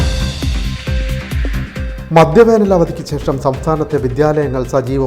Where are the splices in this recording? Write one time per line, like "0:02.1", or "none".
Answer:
0:01.4